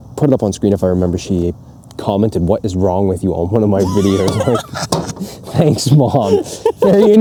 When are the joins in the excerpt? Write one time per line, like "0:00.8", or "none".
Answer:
none